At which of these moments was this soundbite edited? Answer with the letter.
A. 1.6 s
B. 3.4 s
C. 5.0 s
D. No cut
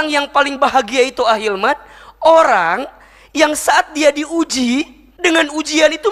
C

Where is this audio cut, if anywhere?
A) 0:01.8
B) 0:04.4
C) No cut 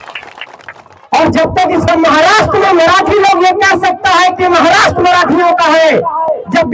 A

